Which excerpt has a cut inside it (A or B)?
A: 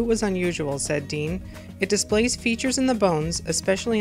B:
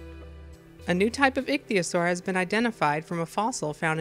A